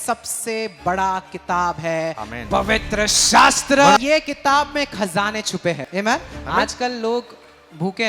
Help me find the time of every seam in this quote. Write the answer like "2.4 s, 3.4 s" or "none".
4.0 s, 5.8 s